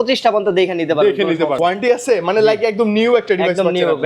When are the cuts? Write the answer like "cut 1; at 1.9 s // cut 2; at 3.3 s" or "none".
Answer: cut 1; at 1.6 s